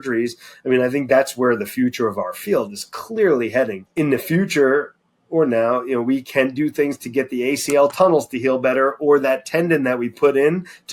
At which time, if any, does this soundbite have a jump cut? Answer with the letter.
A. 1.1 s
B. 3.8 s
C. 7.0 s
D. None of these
B